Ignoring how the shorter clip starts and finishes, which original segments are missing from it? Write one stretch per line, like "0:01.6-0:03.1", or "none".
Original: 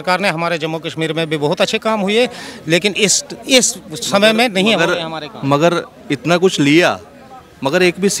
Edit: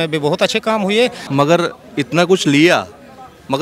0:02.4-0:05.3